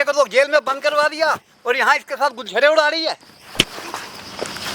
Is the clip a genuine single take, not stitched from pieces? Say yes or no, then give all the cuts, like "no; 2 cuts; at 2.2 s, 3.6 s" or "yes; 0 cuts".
no; 1 cut; at 3.4 s